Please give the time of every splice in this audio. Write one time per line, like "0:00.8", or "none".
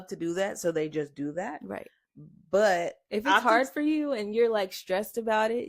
none